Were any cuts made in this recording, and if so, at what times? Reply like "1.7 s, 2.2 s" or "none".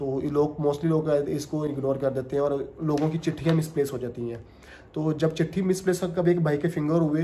none